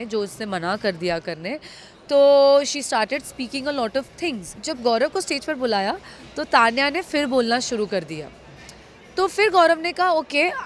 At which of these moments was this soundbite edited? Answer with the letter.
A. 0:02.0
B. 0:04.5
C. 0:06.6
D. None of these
B